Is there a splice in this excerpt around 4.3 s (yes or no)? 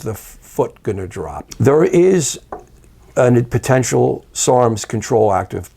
yes